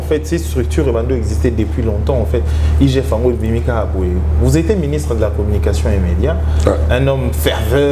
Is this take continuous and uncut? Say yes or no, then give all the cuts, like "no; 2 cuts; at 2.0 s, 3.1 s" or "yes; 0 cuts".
yes; 0 cuts